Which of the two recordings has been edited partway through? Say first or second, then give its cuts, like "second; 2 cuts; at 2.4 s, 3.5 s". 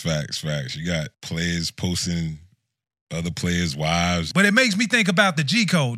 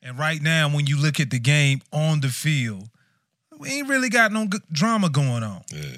first; 2 cuts; at 1.2 s, 4.3 s